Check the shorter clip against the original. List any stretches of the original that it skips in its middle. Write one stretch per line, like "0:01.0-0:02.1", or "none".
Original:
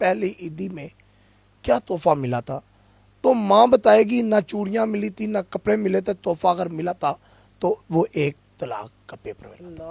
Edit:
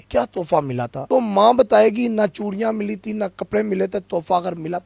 0:02.5-0:03.1